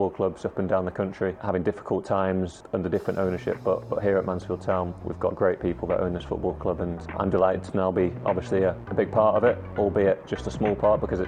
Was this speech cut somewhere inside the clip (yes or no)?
yes